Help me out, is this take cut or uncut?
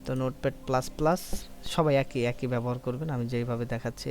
cut